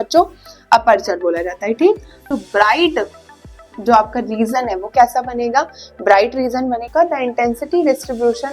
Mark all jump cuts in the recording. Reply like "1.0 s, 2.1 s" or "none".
2.3 s, 6.9 s